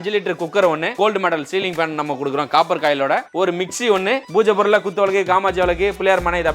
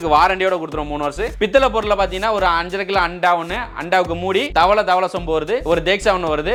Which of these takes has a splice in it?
first; 3 cuts; at 0.9 s, 3.3 s, 4.3 s

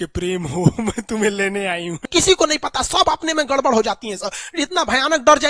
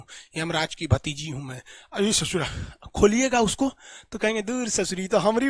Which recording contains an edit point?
first; 1 cut; at 2.1 s

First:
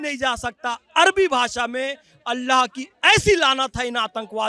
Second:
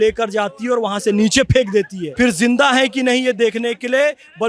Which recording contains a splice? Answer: second; 1 cut; at 2.0 s

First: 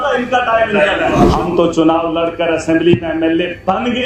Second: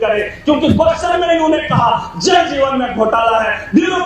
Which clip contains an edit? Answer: first; 1 cut; at 1.3 s

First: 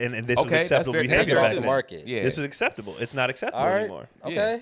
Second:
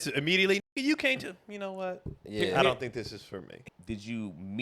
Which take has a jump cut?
second; 1 cut; at 3.5 s

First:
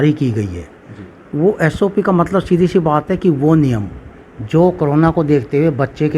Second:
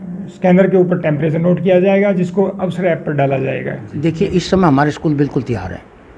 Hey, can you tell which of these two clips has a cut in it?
second; 1 cut; at 3.8 s

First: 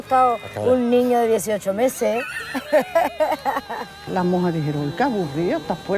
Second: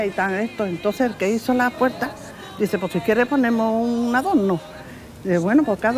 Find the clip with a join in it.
first; 1 cut; at 4.1 s

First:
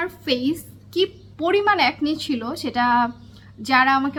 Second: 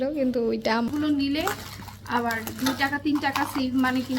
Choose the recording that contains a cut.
second; 1 cut; at 0.9 s

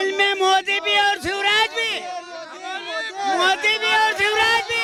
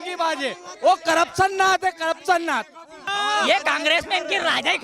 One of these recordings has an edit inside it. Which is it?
second; 1 cut; at 3.1 s

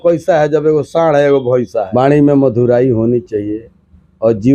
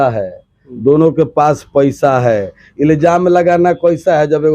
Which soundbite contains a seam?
first; 1 cut; at 1.9 s

